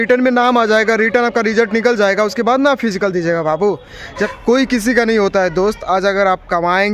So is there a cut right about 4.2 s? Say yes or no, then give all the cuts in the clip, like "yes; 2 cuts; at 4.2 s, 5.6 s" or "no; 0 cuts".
yes; 1 cut; at 4.2 s